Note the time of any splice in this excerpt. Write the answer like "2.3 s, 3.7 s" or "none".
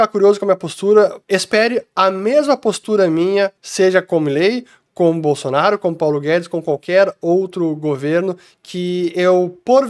1.2 s, 3.6 s